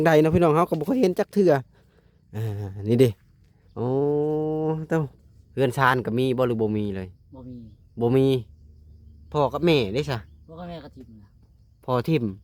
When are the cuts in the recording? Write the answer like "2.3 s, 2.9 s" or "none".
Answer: 5.1 s